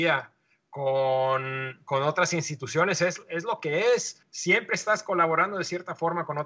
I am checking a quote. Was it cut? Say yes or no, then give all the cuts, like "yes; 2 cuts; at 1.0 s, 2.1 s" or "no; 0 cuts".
yes; 1 cut; at 4.2 s